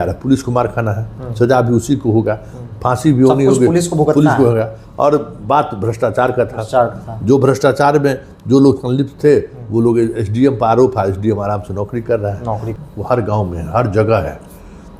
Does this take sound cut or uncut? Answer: cut